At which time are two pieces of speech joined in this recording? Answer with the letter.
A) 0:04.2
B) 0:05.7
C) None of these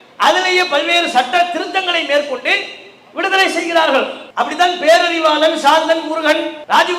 A